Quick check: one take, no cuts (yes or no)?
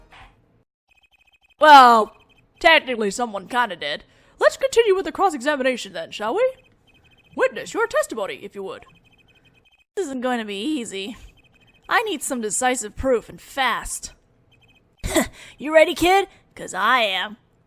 yes